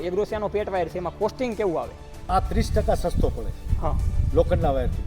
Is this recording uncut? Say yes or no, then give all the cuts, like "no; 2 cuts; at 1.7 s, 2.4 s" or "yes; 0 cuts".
no; 1 cut; at 2.3 s